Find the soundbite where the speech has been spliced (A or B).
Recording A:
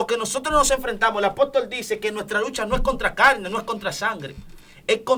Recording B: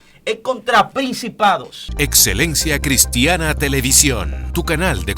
B